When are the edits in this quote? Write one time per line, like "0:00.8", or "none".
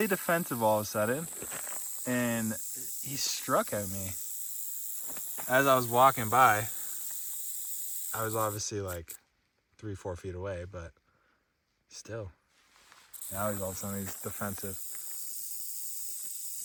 none